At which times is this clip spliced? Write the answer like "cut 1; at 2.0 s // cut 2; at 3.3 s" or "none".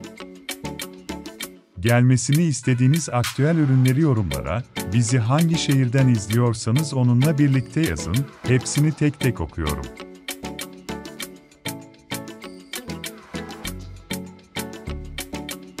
cut 1; at 1.8 s // cut 2; at 9.7 s